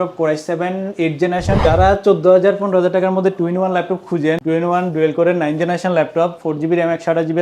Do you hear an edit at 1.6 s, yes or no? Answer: yes